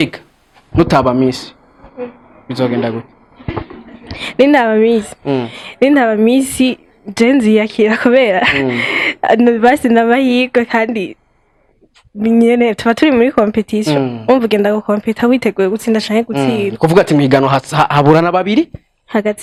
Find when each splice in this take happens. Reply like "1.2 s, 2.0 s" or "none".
none

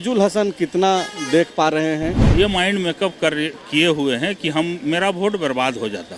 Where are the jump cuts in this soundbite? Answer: 2.2 s

